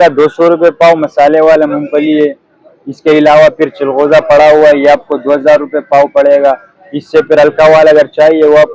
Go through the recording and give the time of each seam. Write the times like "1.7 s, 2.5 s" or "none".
none